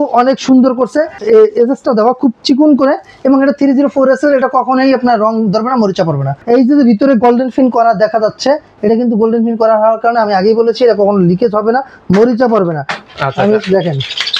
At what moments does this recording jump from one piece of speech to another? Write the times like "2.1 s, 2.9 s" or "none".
1.2 s, 6.3 s, 13.0 s